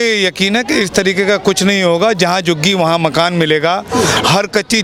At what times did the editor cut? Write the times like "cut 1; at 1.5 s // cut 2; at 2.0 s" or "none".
none